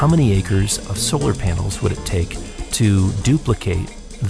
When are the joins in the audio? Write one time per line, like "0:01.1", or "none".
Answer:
none

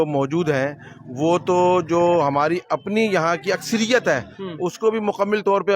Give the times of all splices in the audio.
none

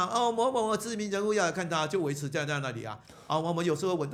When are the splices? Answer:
none

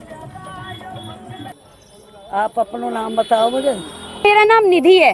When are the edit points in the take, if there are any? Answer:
0:01.5
0:04.2

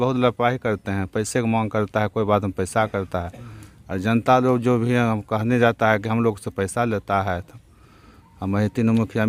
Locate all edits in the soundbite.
none

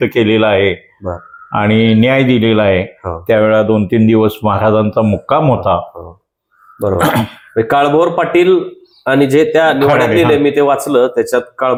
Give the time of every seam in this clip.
none

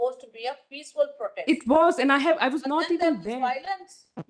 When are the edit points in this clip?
none

